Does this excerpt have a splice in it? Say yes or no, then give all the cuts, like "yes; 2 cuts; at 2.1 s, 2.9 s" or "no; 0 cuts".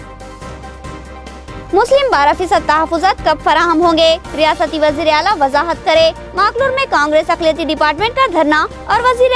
yes; 1 cut; at 1.1 s